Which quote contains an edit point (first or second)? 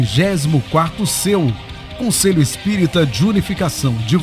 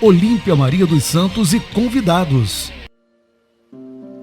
second